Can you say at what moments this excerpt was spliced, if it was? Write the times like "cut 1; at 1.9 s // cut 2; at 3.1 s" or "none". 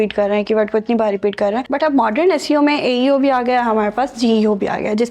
cut 1; at 1.6 s